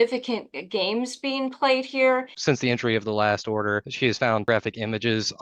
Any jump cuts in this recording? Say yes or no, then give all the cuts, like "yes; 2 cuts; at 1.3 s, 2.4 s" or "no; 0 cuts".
yes; 2 cuts; at 2.3 s, 4.4 s